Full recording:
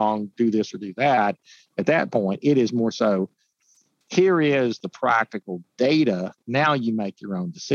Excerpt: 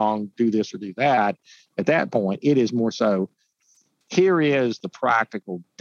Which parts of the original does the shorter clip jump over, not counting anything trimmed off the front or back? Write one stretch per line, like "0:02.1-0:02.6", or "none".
none